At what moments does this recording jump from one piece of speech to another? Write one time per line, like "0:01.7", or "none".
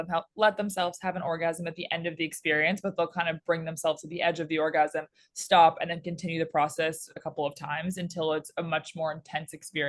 none